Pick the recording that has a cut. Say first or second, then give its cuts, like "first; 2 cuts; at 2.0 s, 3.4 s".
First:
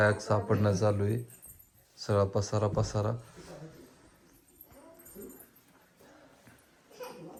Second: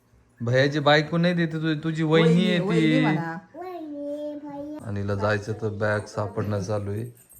second; 1 cut; at 4.8 s